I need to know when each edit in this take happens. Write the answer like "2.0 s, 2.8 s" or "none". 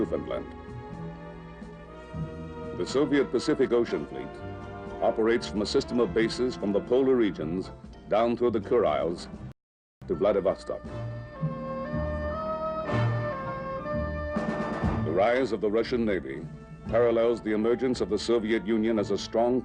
3.4 s